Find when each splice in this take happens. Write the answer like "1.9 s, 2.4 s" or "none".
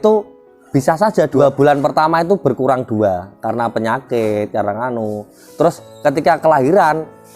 1.4 s